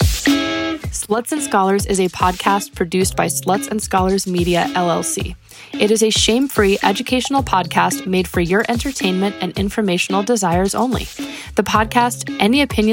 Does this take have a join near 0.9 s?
yes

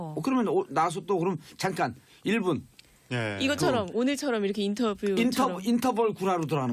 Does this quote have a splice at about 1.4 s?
yes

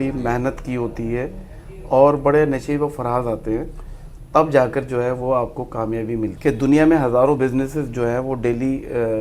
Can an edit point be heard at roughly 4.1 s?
no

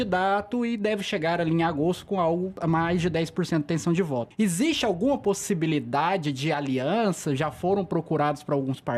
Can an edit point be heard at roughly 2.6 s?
yes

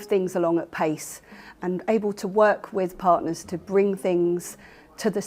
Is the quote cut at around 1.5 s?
no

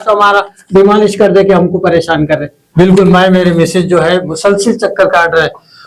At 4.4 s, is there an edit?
no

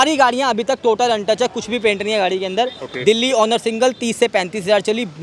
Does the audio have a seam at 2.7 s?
no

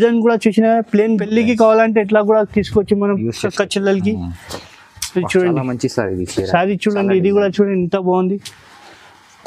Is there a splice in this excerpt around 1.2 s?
yes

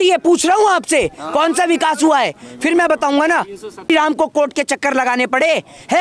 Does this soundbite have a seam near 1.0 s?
no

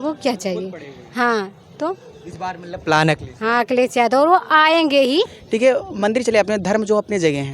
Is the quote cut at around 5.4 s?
yes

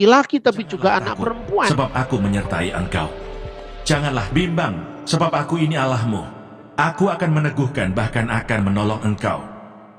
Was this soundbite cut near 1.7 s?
yes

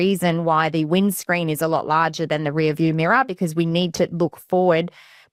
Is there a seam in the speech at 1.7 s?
no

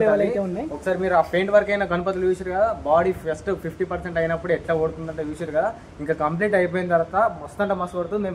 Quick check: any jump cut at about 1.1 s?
no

